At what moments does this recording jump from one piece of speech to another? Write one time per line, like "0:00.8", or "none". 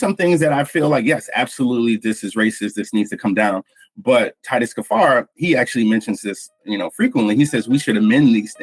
none